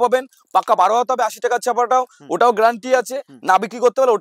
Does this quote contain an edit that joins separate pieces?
no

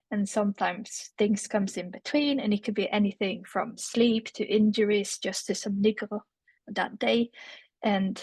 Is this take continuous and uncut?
yes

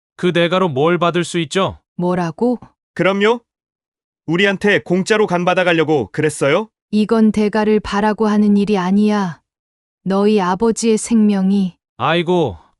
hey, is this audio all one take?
no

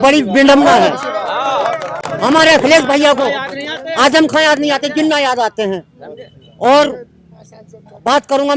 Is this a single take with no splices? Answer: yes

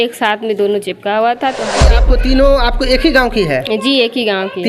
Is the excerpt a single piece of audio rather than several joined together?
no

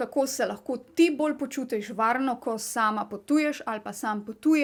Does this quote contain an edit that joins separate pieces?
no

